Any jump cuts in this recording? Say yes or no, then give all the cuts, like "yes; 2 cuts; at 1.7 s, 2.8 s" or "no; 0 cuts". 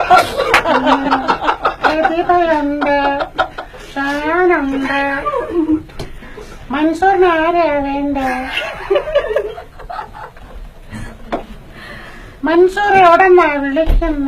yes; 1 cut; at 12.6 s